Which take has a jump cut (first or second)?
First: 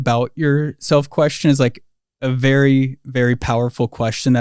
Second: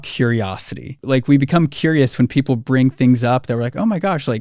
second